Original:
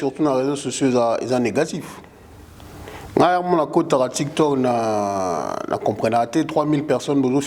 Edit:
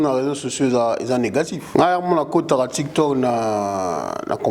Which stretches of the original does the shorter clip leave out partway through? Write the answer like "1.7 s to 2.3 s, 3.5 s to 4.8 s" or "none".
1.8 s to 3.0 s